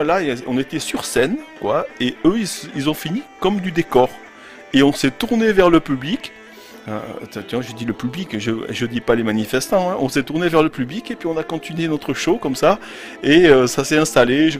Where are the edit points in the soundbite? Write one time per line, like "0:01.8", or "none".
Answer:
none